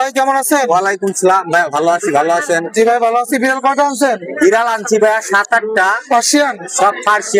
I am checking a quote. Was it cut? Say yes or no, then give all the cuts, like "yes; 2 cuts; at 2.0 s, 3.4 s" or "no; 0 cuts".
no; 0 cuts